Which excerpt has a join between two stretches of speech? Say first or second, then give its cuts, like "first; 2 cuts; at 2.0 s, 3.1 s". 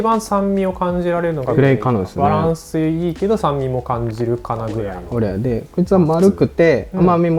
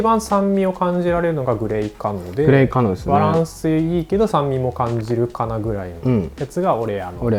first; 2 cuts; at 1.5 s, 5.0 s